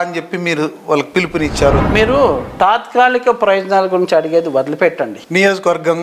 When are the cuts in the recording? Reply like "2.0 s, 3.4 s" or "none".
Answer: 1.9 s, 5.2 s